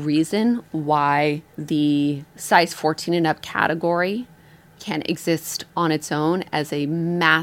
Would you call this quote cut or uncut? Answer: cut